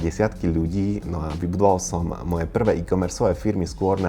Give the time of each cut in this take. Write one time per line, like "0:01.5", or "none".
none